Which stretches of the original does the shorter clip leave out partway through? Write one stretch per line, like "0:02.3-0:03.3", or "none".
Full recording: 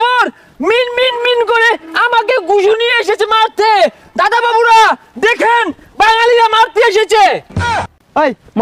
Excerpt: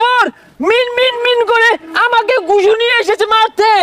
none